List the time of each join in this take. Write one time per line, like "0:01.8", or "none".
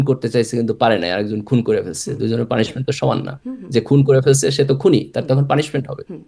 none